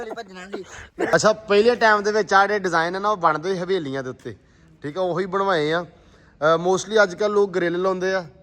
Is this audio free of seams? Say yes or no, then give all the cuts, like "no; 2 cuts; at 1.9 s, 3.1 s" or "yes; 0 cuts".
no; 1 cut; at 1.1 s